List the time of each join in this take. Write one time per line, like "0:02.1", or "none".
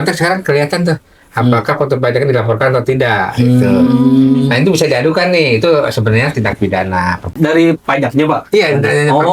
0:07.3